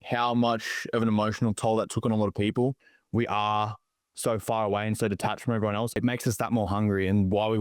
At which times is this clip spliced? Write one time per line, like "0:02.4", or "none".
0:02.9
0:05.9